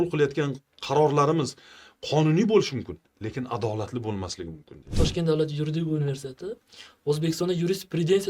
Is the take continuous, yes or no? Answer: no